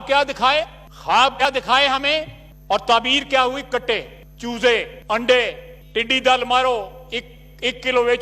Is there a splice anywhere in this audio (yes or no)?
yes